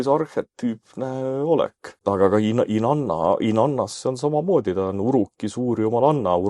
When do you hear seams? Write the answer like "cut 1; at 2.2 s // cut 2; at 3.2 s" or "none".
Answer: cut 1; at 2.0 s